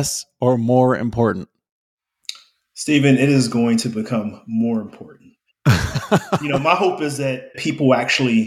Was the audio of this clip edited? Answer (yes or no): yes